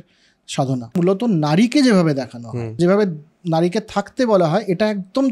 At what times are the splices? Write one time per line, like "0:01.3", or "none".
0:01.0
0:02.8